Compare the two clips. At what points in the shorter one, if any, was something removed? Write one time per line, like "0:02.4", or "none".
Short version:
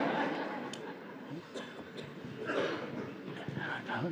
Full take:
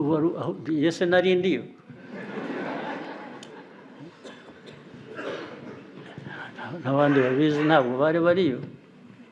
none